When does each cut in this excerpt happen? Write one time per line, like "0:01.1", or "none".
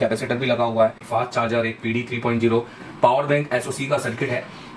0:01.0